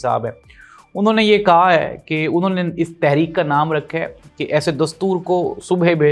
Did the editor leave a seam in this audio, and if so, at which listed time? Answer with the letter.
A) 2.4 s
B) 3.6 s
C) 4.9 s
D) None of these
D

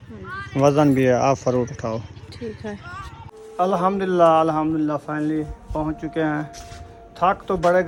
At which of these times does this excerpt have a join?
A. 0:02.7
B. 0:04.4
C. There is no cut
C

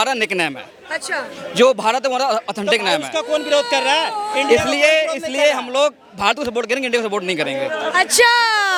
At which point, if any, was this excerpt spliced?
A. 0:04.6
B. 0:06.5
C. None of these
C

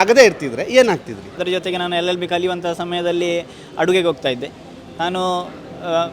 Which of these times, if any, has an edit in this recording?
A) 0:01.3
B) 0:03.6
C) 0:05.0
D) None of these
A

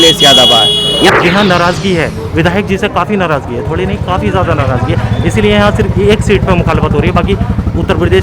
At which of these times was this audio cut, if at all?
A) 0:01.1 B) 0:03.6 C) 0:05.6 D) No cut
A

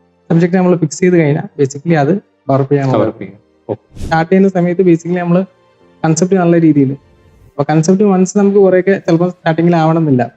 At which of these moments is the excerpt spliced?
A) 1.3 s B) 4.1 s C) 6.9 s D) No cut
B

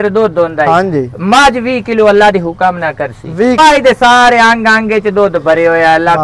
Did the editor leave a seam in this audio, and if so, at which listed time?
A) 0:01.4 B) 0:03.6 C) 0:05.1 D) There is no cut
B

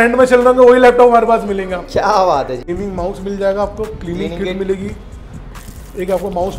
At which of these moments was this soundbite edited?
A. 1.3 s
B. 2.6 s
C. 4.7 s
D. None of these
B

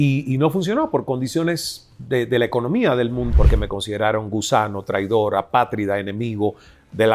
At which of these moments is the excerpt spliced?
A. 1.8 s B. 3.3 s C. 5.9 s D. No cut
B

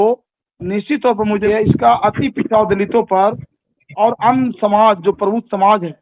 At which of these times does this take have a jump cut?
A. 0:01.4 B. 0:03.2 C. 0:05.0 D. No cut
A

